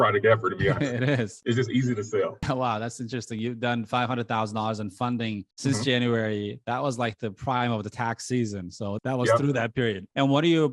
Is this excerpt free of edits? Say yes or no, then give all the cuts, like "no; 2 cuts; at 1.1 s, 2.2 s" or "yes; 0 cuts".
yes; 0 cuts